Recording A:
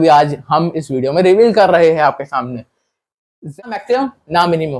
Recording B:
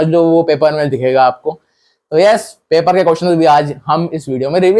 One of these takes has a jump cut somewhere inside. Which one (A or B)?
A